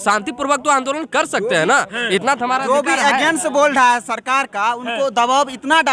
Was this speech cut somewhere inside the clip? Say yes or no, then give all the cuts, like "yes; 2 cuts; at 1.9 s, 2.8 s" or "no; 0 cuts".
no; 0 cuts